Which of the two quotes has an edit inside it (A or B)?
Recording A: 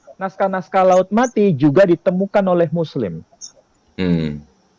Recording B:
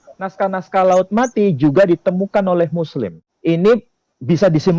B